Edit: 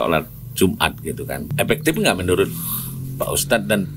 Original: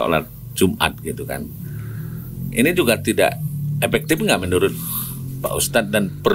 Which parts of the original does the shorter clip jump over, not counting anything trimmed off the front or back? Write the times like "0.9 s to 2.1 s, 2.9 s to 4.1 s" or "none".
1.5 s to 3.7 s